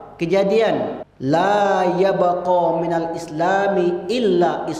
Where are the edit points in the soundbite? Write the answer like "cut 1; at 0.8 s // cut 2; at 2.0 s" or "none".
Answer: cut 1; at 1.1 s